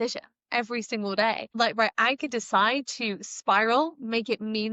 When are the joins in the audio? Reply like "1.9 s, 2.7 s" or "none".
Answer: 1.6 s